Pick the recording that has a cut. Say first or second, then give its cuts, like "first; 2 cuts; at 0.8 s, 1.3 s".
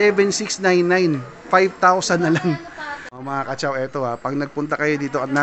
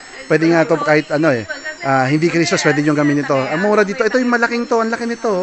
first; 1 cut; at 3.3 s